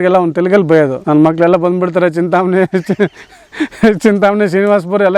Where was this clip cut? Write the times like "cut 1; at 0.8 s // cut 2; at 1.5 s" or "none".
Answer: cut 1; at 1.0 s